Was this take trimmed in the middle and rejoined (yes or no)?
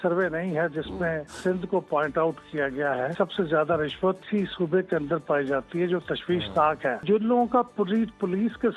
yes